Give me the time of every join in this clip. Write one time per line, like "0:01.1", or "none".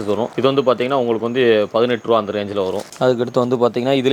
none